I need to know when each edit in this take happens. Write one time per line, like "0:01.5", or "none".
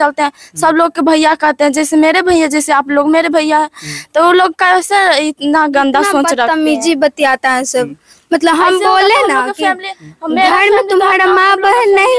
none